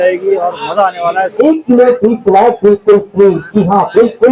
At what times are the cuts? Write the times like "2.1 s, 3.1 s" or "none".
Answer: 1.3 s